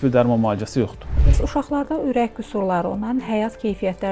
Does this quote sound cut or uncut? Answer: cut